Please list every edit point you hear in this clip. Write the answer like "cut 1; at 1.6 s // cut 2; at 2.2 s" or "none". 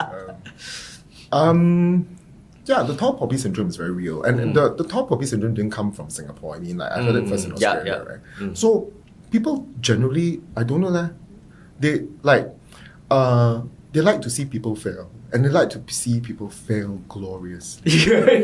none